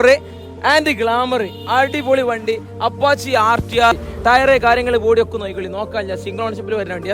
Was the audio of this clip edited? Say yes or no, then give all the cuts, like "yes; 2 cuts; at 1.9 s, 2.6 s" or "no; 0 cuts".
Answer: yes; 1 cut; at 3.9 s